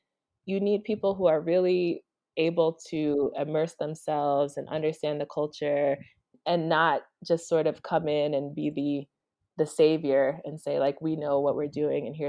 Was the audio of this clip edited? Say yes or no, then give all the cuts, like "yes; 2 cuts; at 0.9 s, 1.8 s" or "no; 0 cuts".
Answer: yes; 1 cut; at 6.3 s